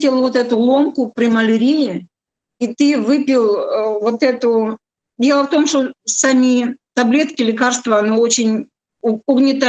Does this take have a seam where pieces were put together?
no; 0 cuts

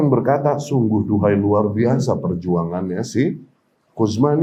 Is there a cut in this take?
no; 0 cuts

